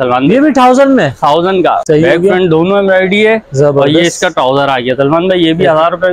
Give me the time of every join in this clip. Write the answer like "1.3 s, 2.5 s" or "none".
1.8 s